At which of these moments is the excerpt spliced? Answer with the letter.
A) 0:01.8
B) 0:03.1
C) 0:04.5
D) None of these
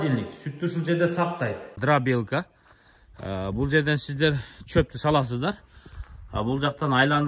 A